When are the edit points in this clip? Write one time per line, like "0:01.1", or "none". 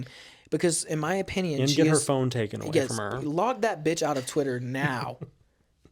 none